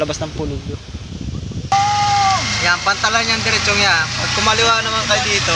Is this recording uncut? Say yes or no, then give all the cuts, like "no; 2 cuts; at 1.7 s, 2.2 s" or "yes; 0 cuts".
no; 1 cut; at 1.7 s